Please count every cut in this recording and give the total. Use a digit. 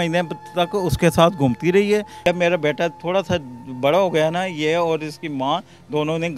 1